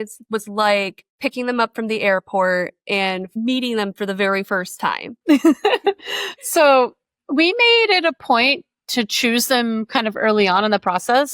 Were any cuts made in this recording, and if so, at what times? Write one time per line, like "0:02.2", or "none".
0:01.0
0:05.1